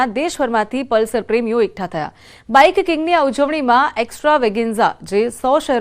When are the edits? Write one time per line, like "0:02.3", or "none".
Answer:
0:01.4